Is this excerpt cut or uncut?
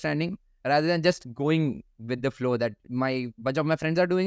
uncut